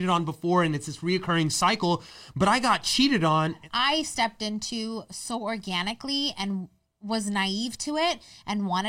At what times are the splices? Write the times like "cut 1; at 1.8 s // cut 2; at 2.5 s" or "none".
cut 1; at 3.6 s